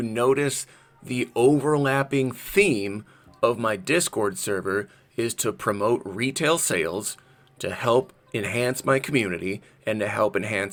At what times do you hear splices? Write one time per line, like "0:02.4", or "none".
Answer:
none